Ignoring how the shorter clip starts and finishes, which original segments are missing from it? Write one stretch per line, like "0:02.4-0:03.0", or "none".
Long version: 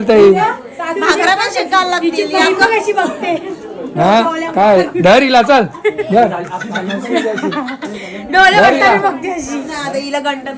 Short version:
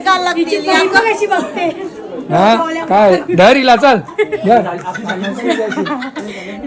none